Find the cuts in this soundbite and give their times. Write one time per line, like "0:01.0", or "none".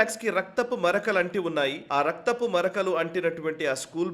0:01.8